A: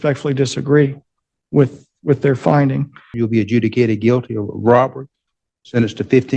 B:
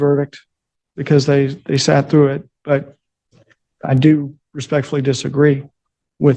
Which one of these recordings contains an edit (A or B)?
A